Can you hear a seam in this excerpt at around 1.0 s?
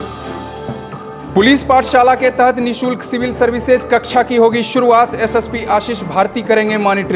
yes; 1 cut; at 1.0 s

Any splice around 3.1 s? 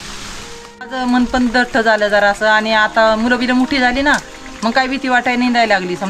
no; 1 cut; at 0.9 s

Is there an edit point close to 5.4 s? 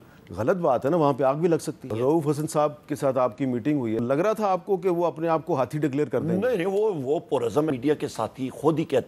no; 3 cuts; at 1.9 s, 4.0 s, 7.7 s

